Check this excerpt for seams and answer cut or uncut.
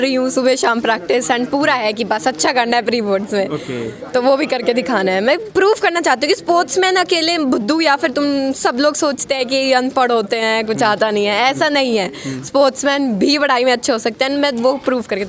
uncut